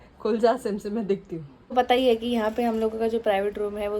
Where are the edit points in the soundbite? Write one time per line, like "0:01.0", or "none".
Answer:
0:01.7